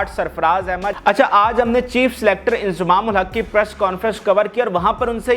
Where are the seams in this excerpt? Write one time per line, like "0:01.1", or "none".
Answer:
0:01.0